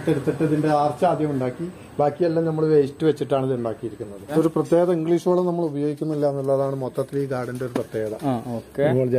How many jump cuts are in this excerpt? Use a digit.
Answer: 1